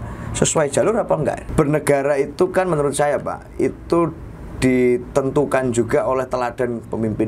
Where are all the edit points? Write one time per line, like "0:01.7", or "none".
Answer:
0:01.4